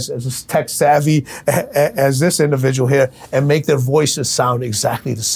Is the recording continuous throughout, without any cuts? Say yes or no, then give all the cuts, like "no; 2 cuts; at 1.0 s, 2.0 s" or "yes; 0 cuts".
yes; 0 cuts